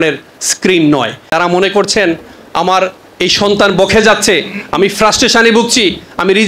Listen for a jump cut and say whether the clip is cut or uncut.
cut